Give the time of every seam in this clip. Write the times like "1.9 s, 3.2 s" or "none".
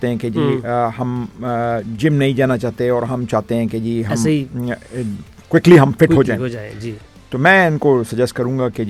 none